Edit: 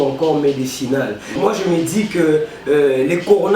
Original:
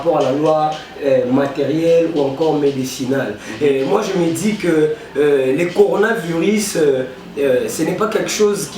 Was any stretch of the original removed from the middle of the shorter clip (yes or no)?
yes